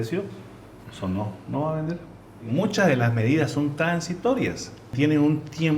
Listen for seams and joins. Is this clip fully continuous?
no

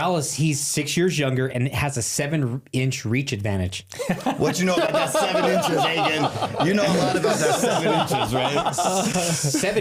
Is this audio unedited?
yes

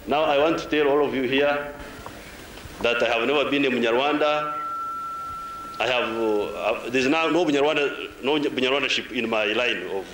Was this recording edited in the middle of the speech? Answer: no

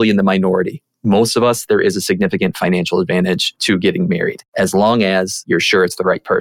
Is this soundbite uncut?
no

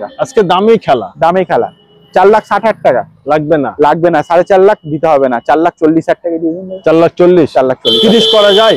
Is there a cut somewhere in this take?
no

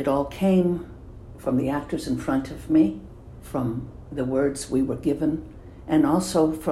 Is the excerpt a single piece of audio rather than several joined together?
yes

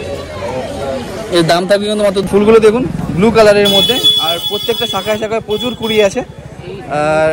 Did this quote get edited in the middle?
yes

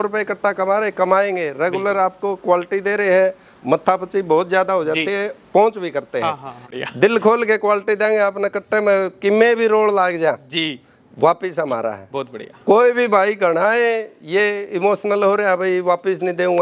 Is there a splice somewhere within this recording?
yes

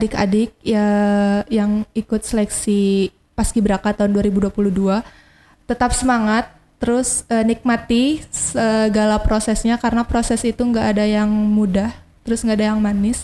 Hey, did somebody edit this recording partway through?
no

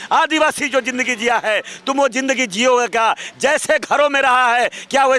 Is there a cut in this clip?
no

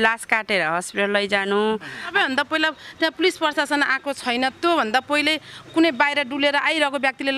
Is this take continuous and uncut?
no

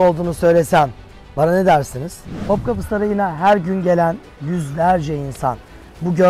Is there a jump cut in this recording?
yes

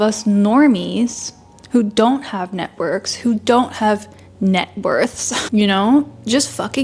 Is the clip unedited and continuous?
yes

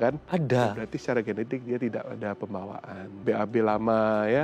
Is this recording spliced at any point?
yes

